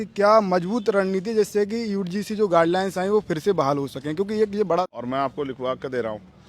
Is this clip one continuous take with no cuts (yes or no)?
no